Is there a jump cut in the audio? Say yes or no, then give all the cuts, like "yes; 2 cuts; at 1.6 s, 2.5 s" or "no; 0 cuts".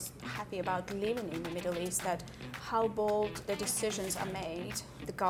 no; 0 cuts